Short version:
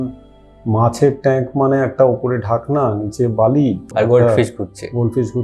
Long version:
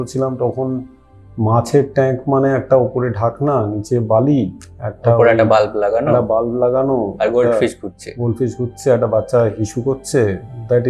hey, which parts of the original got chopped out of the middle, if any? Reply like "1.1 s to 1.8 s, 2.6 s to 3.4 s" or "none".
4.6 s to 7.1 s